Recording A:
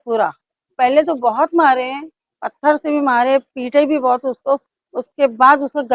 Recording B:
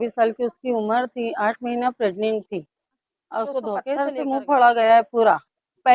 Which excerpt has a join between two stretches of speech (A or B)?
B